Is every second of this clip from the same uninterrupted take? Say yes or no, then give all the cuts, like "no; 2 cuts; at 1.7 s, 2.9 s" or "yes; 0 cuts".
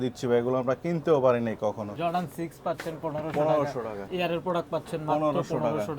no; 2 cuts; at 1.9 s, 4.0 s